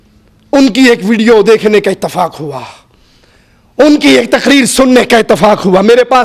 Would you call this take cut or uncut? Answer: uncut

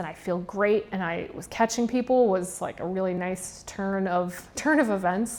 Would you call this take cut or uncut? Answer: uncut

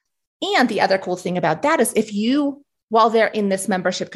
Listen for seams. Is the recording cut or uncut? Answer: uncut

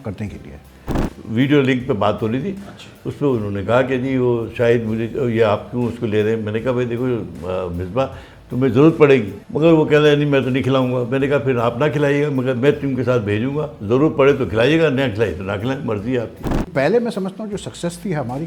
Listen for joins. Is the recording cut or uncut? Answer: cut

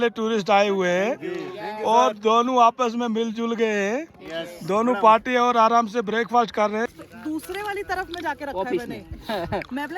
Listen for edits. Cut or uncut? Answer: cut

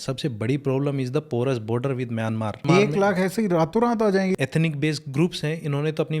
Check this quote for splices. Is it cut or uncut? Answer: cut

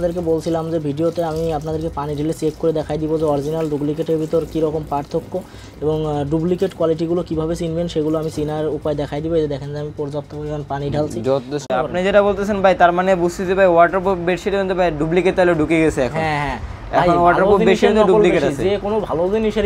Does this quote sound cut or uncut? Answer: cut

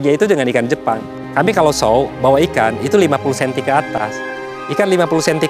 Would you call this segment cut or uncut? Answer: cut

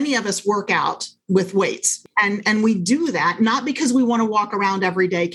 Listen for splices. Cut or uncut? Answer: cut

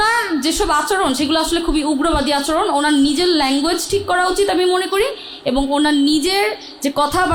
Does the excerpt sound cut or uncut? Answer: uncut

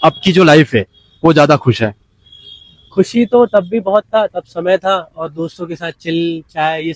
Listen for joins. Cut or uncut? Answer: uncut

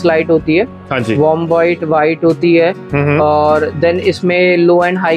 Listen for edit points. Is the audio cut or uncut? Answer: uncut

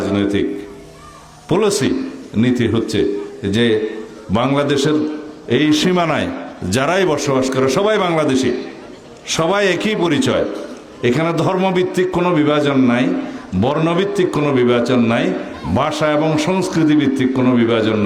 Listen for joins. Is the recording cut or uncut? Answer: uncut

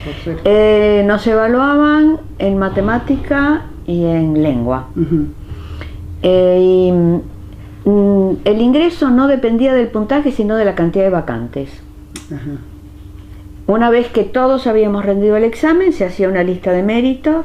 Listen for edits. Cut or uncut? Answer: cut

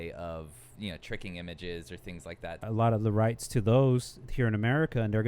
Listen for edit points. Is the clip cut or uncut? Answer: cut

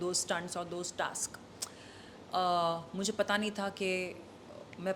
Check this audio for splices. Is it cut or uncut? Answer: uncut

